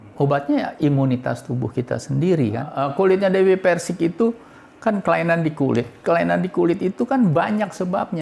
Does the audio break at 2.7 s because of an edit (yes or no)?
yes